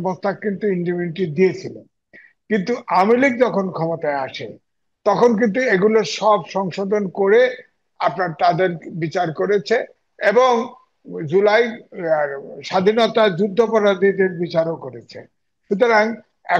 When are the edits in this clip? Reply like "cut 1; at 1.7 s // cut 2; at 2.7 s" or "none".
none